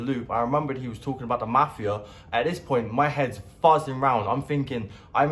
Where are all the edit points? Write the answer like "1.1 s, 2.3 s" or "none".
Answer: none